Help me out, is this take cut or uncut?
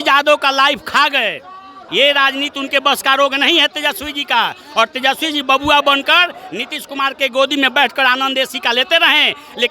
cut